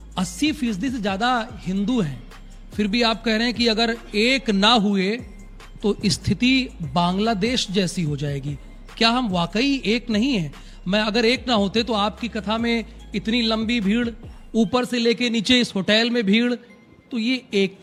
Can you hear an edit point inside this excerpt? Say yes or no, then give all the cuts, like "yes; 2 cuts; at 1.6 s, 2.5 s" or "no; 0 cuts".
no; 0 cuts